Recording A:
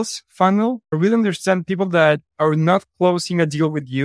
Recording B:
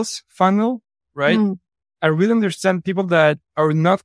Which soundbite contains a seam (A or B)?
A